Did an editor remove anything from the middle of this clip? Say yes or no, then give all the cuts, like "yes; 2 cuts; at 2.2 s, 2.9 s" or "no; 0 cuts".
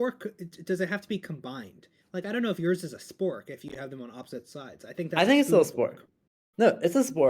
yes; 1 cut; at 5.2 s